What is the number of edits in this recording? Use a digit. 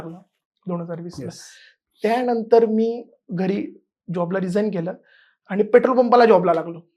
0